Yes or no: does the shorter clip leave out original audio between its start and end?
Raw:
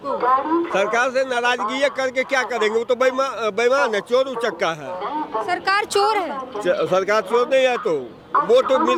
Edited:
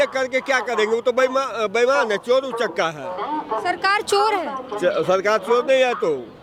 no